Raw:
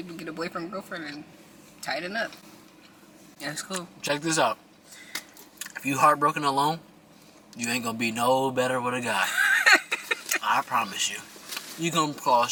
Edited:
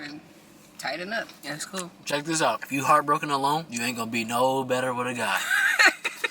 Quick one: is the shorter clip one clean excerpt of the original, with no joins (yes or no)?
no